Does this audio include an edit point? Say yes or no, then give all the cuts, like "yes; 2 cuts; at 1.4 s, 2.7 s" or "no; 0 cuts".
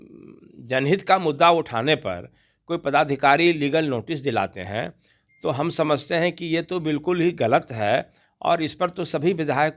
no; 0 cuts